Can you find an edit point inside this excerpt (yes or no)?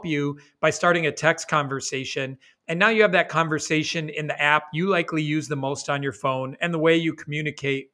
no